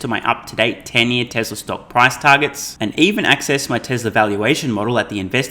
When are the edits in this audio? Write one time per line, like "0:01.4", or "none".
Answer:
none